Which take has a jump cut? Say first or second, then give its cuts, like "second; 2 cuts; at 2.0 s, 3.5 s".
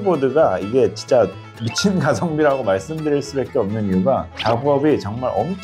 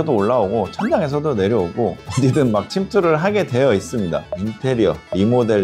second; 1 cut; at 4.3 s